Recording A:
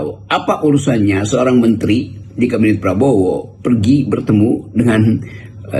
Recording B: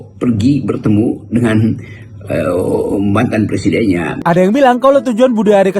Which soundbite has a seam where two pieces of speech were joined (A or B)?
B